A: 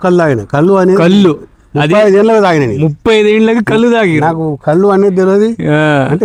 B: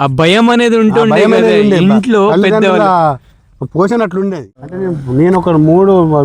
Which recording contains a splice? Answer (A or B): B